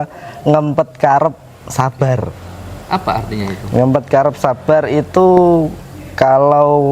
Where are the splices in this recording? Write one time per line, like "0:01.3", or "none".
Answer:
none